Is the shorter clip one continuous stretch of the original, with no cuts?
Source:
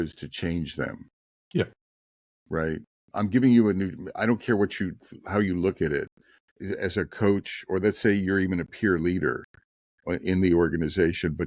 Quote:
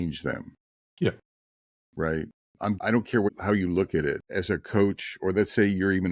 no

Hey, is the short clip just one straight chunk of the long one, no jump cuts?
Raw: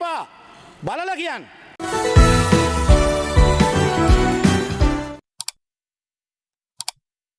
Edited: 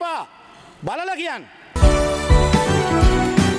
no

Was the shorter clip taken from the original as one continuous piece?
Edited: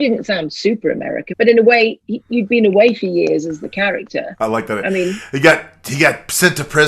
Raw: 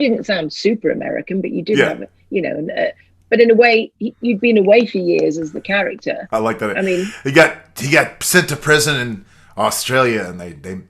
no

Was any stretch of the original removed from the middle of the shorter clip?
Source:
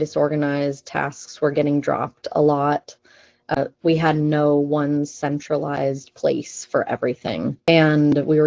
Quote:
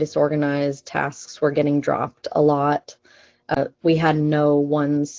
no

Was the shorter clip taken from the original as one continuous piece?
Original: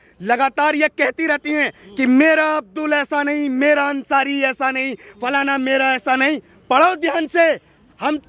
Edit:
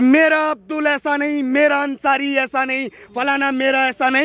yes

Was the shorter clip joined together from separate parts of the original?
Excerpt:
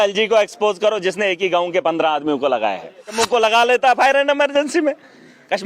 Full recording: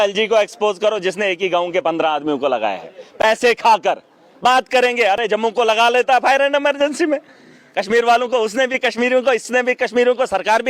yes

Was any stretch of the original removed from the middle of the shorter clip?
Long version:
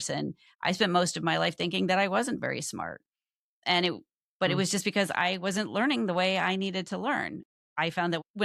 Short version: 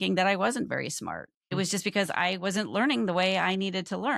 yes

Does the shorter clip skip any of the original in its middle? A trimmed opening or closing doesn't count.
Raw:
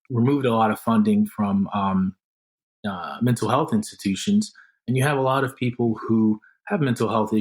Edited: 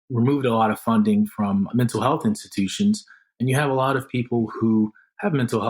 yes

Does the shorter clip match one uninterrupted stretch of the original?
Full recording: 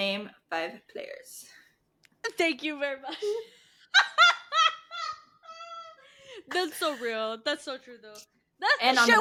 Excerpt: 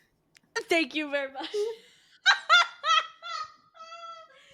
yes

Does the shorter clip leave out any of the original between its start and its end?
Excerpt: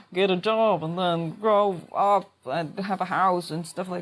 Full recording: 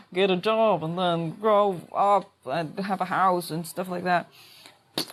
no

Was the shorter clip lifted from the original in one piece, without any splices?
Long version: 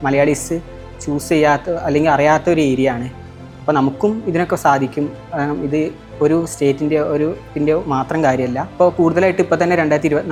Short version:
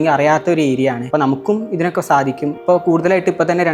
no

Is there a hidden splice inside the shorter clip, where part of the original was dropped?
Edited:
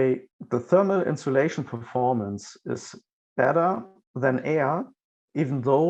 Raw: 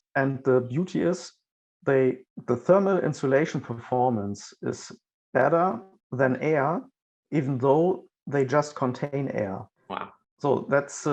no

